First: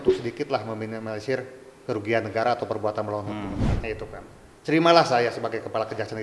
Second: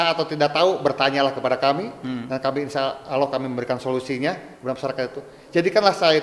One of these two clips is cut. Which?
first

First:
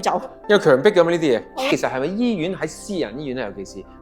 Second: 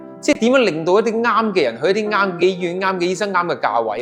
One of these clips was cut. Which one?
first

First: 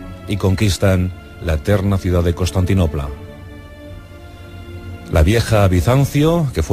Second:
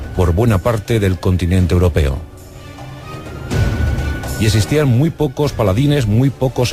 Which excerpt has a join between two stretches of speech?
first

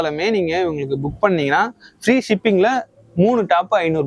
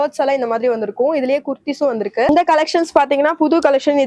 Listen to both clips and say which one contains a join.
second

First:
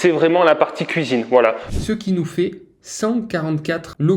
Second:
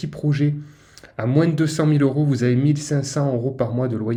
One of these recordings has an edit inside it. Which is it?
first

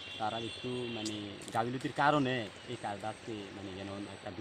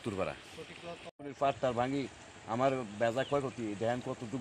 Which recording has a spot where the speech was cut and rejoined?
second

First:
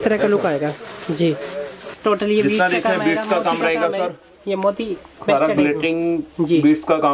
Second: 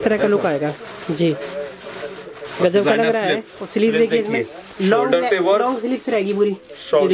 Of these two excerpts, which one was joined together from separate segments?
first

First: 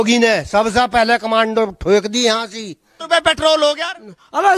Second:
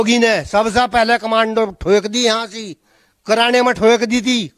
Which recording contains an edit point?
first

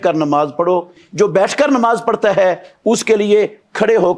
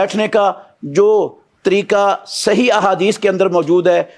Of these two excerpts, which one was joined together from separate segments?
first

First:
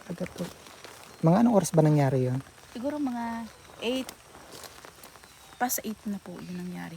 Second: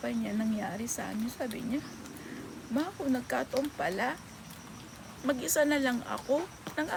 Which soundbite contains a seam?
first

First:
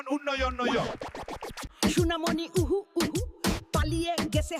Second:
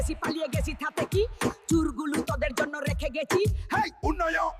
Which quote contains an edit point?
first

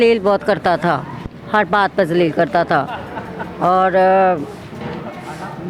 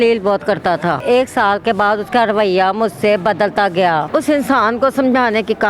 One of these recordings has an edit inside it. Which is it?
second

